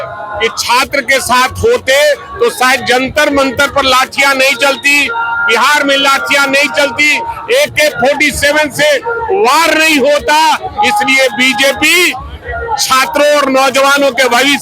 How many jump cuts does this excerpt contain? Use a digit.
0